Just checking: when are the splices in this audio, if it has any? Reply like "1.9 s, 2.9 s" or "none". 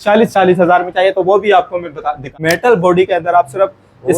2.3 s